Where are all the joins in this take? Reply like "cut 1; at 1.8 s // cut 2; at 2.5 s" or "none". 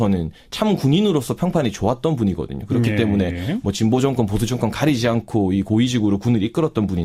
cut 1; at 3.8 s